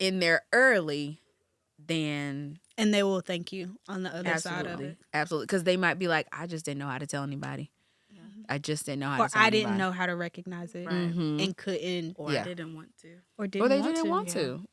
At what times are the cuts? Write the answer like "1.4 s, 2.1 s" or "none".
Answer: none